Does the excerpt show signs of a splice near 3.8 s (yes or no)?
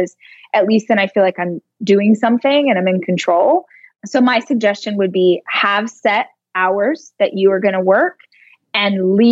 yes